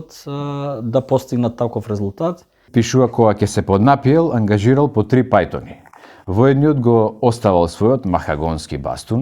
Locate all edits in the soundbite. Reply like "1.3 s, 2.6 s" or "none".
2.6 s